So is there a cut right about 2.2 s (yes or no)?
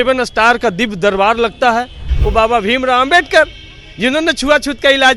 yes